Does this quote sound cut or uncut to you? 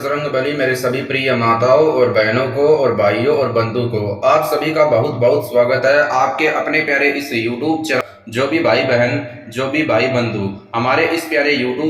cut